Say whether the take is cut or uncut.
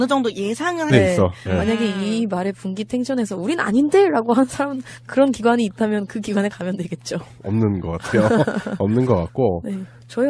uncut